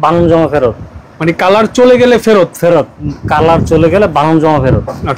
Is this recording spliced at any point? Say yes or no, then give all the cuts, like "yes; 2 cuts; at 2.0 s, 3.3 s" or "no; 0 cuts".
no; 0 cuts